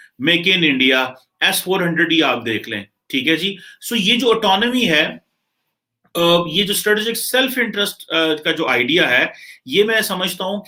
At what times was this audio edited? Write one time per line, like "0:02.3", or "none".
none